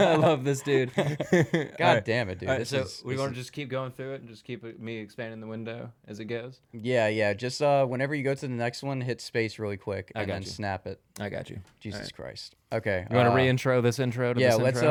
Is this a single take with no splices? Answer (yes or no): yes